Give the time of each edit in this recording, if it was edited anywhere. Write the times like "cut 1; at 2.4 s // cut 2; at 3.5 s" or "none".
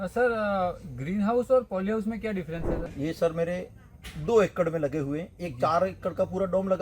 cut 1; at 2.9 s